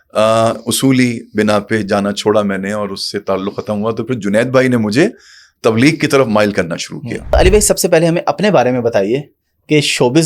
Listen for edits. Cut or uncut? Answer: cut